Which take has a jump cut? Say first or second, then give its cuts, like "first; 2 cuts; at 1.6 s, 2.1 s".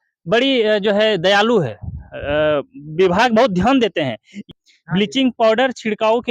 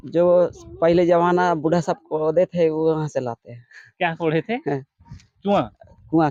first; 1 cut; at 4.4 s